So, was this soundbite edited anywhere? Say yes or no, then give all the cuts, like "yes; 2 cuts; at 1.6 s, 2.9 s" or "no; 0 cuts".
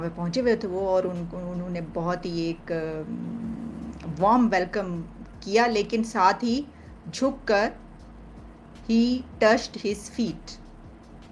no; 0 cuts